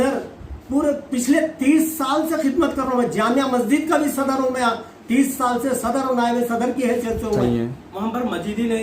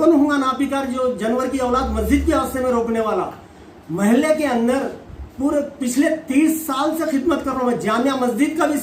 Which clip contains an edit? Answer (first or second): first